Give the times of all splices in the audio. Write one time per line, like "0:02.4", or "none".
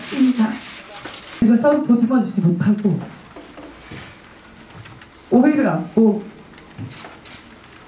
0:01.4